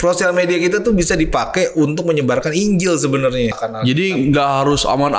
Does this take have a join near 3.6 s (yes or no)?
yes